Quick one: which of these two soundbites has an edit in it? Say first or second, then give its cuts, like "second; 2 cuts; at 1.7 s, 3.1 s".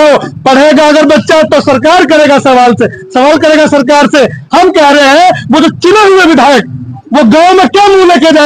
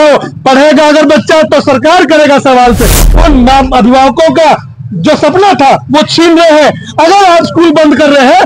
second; 1 cut; at 3.0 s